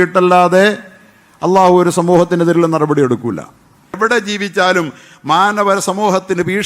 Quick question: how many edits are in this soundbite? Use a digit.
1